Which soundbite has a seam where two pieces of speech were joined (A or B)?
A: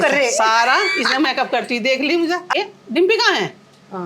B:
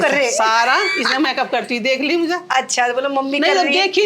A